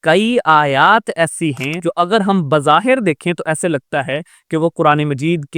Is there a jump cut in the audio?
yes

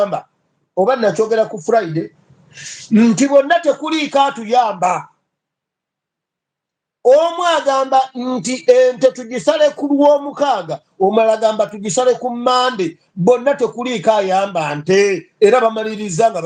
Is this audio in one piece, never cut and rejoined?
yes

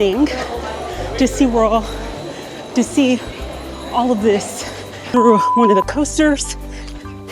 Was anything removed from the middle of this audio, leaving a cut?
yes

